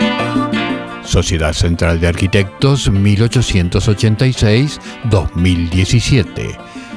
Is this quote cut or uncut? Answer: cut